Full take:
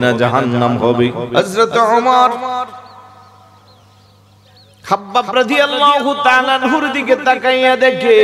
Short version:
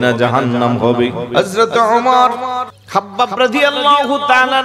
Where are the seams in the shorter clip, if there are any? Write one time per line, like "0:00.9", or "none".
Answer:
0:02.3